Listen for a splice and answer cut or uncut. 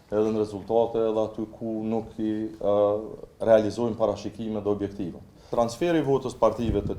cut